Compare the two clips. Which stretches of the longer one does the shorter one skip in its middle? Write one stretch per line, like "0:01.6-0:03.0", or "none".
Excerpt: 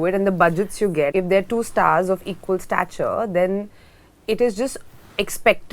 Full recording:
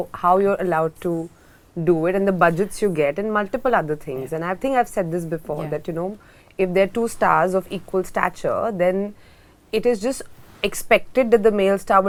0:03.1-0:06.6